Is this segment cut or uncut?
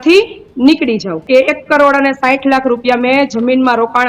cut